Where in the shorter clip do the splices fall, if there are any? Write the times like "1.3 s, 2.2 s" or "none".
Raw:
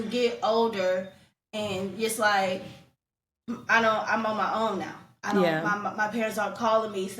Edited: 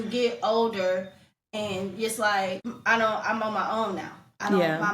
2.7 s

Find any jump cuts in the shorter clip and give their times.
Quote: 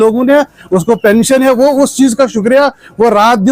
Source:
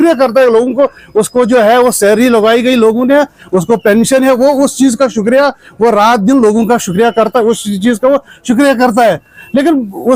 none

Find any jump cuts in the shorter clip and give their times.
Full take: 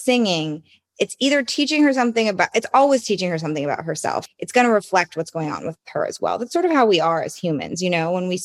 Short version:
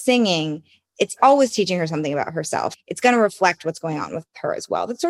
1.1 s

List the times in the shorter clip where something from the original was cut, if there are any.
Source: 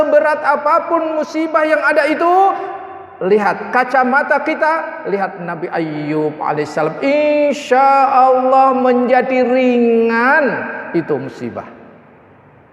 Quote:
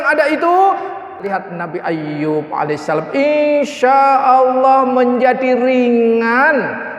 1.1 s

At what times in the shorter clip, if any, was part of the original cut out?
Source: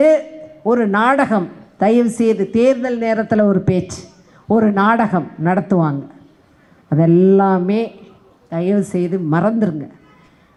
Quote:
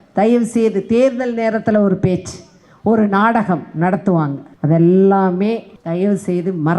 4.5 s, 5.7 s

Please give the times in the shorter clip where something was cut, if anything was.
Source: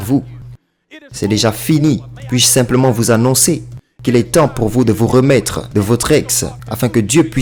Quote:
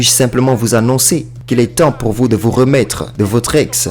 1.4 s

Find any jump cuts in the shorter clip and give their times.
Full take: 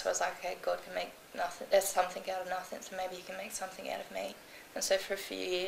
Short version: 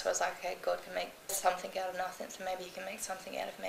1.3 s

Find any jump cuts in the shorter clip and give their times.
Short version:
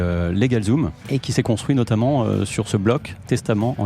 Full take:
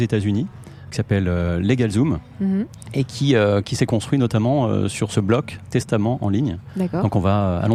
1.2 s

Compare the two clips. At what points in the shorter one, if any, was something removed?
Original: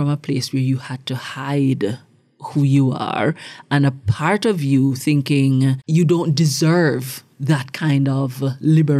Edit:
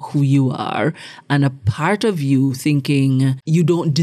none

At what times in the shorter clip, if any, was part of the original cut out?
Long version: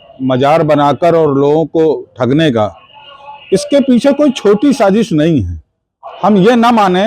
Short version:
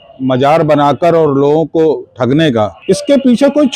2.8 s

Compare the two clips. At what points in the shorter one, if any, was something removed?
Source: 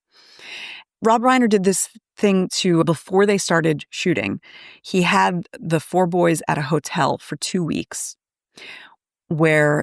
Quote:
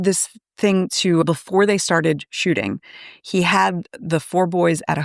none

